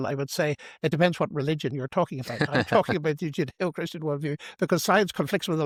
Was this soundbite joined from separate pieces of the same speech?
no; 0 cuts

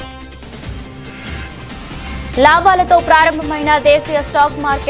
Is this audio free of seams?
no; 1 cut; at 1.8 s

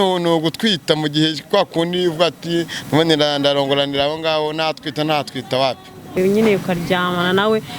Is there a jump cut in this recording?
yes; 1 cut; at 6.2 s

